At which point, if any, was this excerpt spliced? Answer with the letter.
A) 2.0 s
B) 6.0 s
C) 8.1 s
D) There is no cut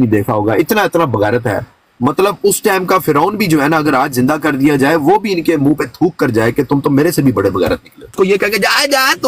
C